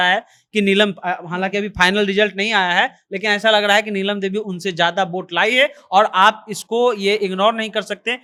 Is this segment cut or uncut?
uncut